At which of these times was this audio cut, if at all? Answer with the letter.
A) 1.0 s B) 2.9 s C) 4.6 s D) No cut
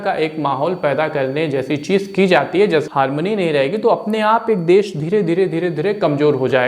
B